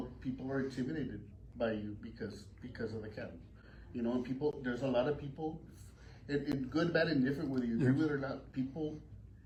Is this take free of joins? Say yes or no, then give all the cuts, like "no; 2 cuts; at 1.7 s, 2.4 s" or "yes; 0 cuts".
yes; 0 cuts